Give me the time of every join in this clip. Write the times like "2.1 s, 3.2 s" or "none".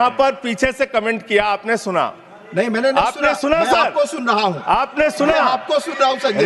none